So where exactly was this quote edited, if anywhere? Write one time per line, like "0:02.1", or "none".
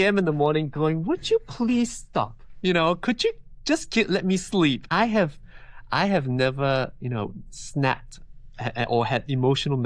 0:04.8